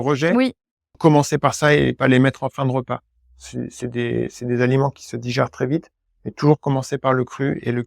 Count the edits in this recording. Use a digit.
1